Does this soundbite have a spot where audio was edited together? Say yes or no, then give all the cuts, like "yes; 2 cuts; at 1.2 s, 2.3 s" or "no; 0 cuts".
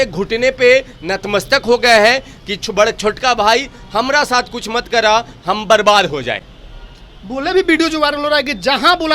no; 0 cuts